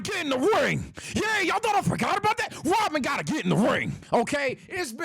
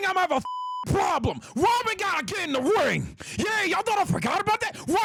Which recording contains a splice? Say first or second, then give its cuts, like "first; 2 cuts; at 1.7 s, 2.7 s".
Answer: first; 1 cut; at 4.0 s